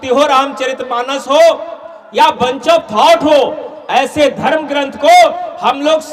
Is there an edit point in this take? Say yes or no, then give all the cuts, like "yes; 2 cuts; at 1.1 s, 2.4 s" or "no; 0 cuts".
no; 0 cuts